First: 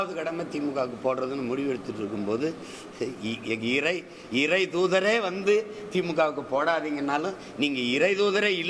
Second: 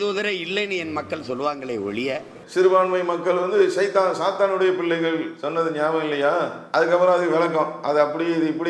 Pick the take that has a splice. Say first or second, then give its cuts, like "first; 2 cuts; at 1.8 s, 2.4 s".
second; 3 cuts; at 2.4 s, 5.4 s, 6.6 s